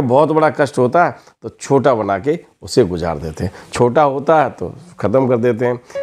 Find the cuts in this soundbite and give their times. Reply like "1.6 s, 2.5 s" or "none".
none